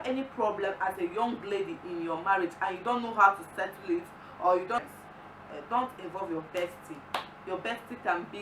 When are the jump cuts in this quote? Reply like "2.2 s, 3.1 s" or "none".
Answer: 4.8 s